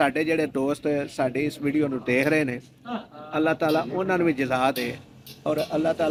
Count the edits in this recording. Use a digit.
0